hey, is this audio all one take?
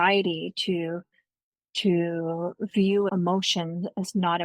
no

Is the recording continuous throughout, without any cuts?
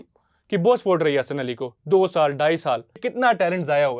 no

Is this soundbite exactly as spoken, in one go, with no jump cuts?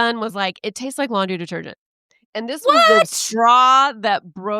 yes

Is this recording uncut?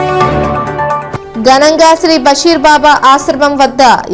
yes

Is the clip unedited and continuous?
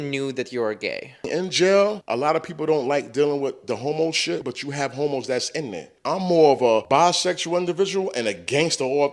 no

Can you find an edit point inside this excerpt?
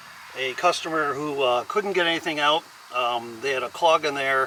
no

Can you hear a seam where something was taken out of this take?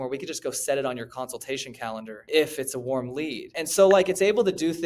yes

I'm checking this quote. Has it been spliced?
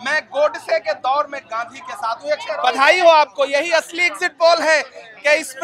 yes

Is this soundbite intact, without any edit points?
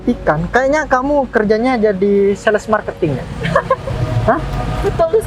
yes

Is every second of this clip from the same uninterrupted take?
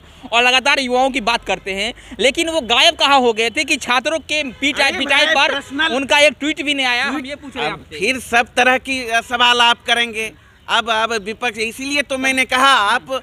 yes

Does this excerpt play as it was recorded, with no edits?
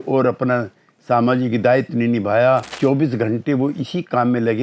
no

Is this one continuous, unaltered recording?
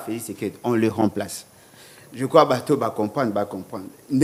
yes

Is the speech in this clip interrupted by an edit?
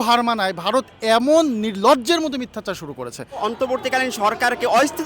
yes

